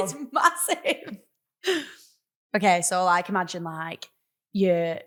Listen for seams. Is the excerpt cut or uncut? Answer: uncut